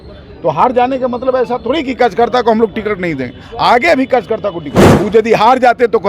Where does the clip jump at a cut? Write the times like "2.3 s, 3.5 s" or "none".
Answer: 4.8 s